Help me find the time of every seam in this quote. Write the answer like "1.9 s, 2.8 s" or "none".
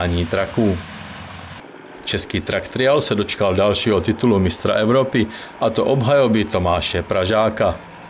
none